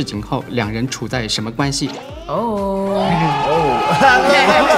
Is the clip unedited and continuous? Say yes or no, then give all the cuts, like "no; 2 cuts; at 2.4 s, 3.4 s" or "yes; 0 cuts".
no; 1 cut; at 2.1 s